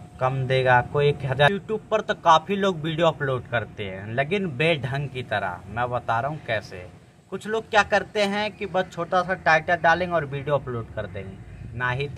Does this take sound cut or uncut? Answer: cut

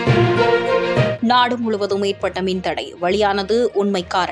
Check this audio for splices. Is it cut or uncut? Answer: cut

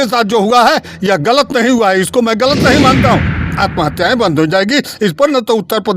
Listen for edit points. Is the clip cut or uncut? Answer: cut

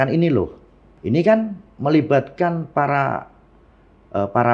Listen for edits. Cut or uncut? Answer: cut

